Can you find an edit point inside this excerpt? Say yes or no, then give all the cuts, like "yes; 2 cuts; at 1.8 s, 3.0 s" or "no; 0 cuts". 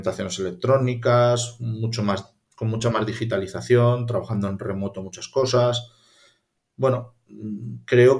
no; 0 cuts